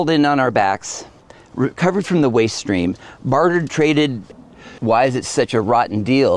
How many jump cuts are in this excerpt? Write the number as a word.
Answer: one